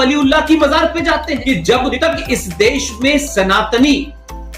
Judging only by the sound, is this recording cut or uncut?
cut